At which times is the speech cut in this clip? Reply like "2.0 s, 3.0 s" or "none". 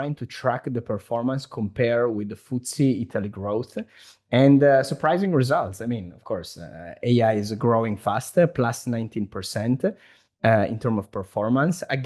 none